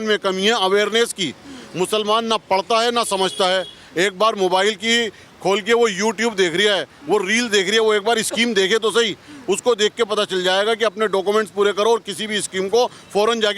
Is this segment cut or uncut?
uncut